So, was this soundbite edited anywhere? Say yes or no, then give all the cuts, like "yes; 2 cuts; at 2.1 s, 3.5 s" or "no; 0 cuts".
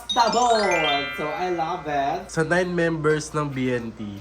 yes; 1 cut; at 2.3 s